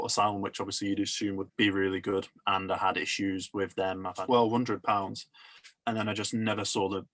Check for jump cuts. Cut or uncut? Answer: cut